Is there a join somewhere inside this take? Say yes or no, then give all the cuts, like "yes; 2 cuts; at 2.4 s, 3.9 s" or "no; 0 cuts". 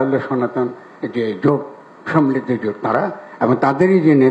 no; 0 cuts